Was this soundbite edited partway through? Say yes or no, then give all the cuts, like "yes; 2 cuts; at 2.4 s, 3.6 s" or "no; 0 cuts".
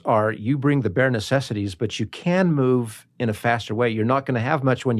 no; 0 cuts